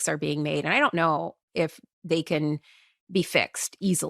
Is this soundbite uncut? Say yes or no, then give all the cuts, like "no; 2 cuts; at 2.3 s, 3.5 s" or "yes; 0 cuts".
yes; 0 cuts